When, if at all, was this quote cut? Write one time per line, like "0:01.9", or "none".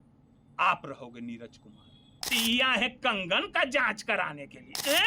0:02.1

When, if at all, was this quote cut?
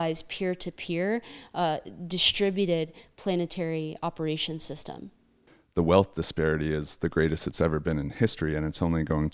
0:05.4

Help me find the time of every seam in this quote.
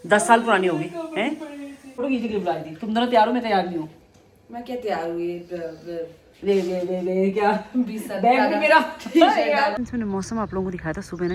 0:02.0
0:09.8

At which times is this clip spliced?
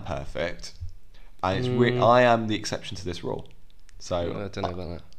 none

